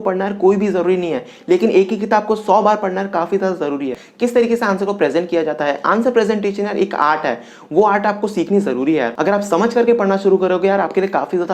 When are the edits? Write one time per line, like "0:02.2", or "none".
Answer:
0:04.0
0:09.1